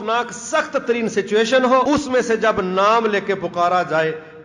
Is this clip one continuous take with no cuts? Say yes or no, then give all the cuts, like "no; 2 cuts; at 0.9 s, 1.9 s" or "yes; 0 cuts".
no; 1 cut; at 1.9 s